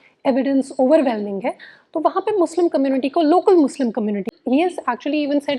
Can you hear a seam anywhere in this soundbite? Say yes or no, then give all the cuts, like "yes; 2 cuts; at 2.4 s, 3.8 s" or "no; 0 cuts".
yes; 1 cut; at 4.3 s